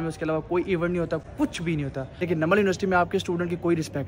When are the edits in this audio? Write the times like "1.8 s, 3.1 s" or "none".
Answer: 1.6 s